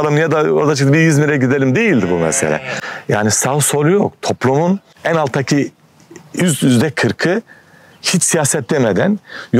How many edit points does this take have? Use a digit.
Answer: 1